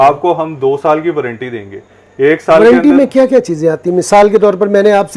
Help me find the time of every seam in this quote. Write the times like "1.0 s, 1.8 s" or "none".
none

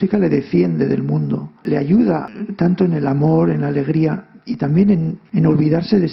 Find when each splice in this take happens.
1.6 s, 2.3 s, 5.2 s

